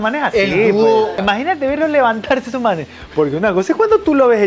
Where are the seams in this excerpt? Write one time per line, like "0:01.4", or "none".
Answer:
0:01.2